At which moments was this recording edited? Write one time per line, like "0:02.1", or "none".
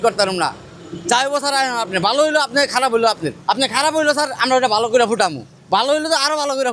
0:03.3